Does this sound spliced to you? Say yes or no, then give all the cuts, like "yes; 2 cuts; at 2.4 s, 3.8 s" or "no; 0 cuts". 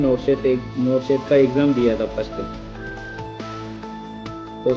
no; 0 cuts